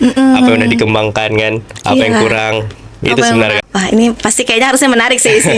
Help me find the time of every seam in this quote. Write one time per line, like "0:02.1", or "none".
0:03.6